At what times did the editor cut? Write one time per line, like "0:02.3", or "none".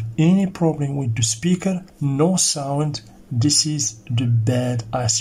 0:01.9

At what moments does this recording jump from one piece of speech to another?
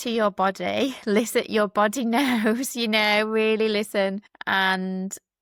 none

